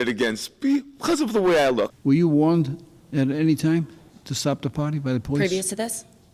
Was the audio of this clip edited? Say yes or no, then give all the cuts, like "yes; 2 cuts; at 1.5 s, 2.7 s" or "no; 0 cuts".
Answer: yes; 1 cut; at 1.9 s